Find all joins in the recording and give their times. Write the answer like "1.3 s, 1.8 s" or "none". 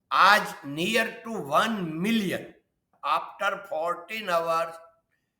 2.8 s

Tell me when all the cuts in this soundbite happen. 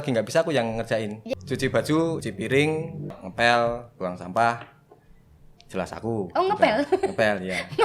1.2 s, 2.2 s, 3.2 s

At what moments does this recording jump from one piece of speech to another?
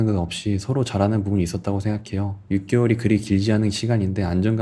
2.4 s

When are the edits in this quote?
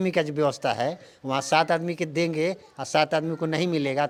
none

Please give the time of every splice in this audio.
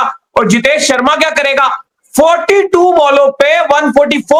none

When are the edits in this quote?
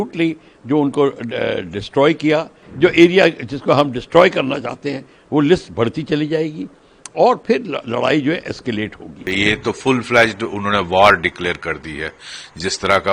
2.6 s, 9.3 s

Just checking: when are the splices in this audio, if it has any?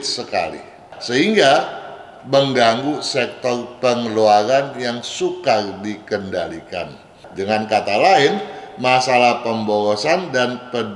none

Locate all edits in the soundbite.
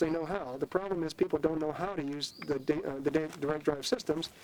none

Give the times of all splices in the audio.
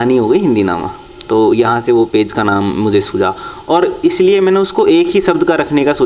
none

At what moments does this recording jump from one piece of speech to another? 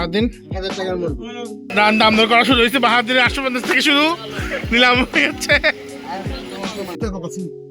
1.7 s, 7.0 s

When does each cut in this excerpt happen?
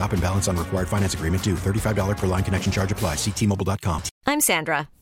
4.1 s

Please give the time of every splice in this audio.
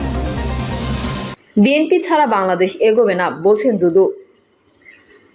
1.3 s

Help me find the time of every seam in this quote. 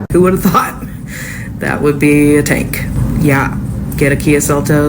2.9 s

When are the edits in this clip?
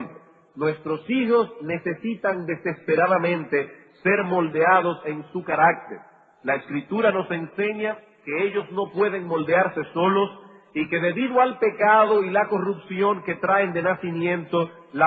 none

